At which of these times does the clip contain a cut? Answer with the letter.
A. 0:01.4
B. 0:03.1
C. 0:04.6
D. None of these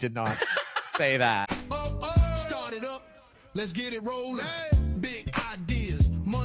A